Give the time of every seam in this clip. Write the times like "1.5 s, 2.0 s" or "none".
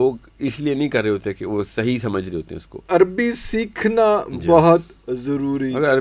2.8 s